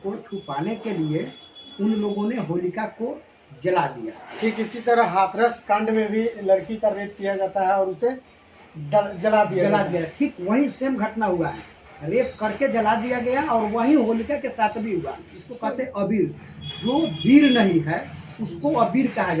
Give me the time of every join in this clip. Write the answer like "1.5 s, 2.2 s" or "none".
15.4 s